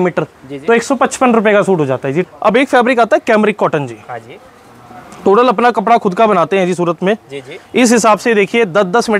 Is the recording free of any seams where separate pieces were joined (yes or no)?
no